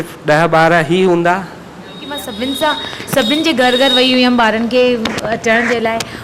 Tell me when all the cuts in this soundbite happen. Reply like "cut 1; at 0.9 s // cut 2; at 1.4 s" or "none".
cut 1; at 2.2 s